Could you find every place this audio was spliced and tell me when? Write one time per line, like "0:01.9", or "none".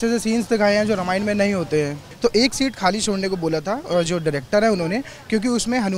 0:02.1